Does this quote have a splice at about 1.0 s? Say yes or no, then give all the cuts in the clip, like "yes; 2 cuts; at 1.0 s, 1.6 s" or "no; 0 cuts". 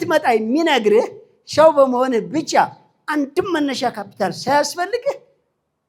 no; 0 cuts